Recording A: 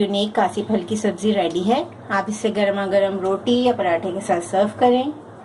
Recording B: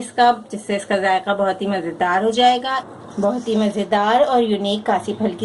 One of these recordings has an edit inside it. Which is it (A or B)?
B